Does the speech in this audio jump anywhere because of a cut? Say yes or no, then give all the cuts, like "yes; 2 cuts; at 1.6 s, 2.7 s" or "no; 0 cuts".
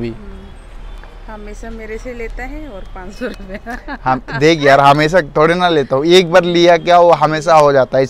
no; 0 cuts